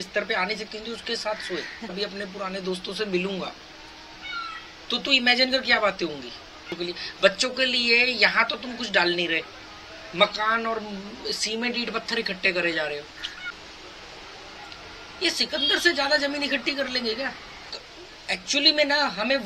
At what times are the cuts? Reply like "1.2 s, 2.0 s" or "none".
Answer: 1.9 s, 6.7 s, 13.5 s, 17.7 s